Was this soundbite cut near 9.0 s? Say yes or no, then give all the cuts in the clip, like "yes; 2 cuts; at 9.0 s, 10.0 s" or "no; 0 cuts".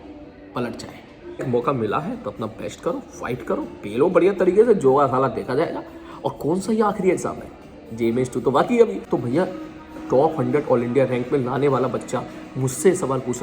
yes; 2 cuts; at 1.5 s, 9.0 s